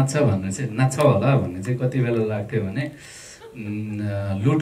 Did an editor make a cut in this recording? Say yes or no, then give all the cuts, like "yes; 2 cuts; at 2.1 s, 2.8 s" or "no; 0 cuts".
no; 0 cuts